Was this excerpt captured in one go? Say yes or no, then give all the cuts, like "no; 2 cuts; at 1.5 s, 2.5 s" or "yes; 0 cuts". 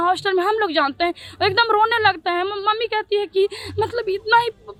yes; 0 cuts